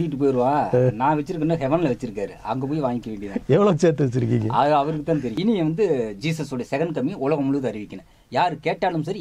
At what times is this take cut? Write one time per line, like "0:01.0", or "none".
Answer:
0:05.4